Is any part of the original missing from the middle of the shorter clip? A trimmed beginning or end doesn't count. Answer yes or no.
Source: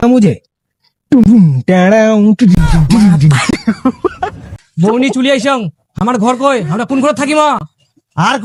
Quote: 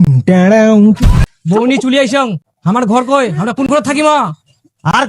yes